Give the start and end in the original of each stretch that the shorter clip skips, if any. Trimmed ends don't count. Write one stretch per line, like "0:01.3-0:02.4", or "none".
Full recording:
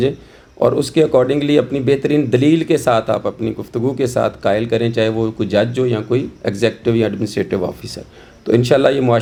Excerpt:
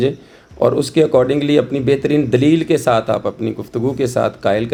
none

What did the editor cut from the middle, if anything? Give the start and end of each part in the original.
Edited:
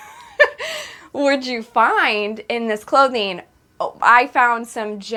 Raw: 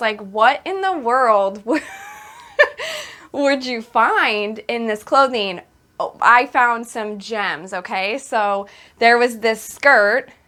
none

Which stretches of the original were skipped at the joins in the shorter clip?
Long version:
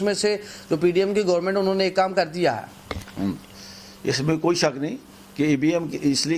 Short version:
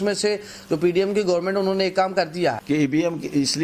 0:02.6-0:05.3

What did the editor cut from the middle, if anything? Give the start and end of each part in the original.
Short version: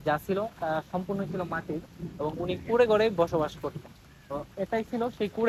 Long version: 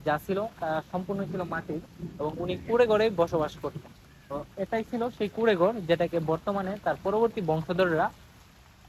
none

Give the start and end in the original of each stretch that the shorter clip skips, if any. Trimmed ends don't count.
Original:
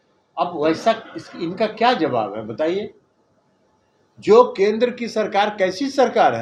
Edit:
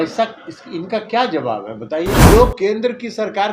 0:02.9-0:04.2

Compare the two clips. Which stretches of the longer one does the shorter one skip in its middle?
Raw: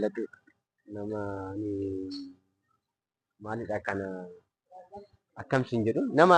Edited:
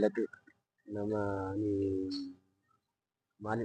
none

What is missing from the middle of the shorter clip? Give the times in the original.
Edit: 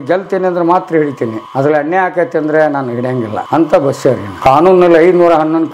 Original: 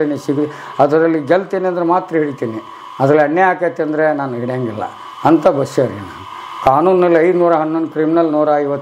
0:02.6-0:02.9
0:04.8-0:05.1
0:06.0-0:06.5

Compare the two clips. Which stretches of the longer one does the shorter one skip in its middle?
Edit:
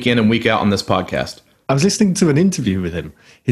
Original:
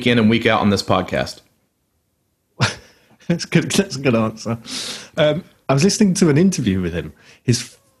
0:01.5-0:05.5

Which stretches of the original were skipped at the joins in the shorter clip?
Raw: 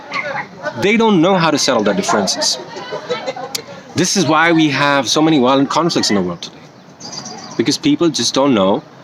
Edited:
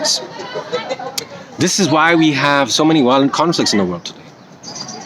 none

